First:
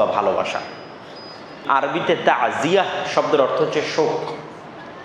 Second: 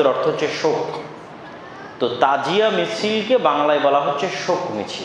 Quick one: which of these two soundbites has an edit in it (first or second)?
first